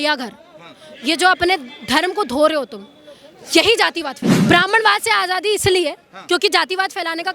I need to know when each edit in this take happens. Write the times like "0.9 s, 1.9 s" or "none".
4.4 s